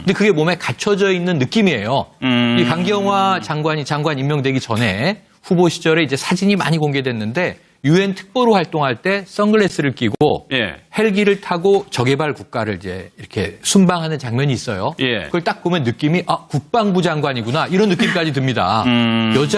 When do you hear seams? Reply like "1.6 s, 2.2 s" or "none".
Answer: 6.6 s